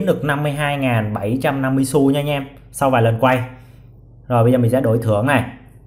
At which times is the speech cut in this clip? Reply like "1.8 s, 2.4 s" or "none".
none